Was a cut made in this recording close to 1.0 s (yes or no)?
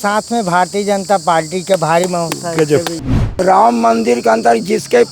no